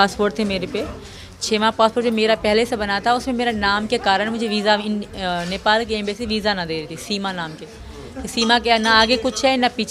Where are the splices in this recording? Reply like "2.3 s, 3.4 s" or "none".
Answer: none